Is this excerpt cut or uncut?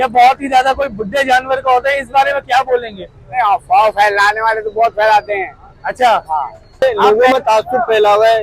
cut